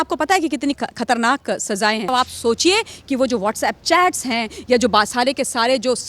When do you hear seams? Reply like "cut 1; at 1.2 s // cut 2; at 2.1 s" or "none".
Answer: cut 1; at 2.1 s